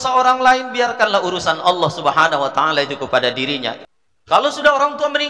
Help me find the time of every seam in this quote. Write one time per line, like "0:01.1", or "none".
0:03.8